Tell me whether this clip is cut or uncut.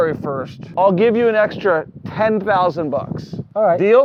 uncut